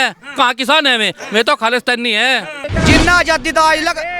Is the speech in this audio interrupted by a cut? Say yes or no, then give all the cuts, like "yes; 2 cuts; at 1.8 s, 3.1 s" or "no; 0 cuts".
yes; 1 cut; at 2.6 s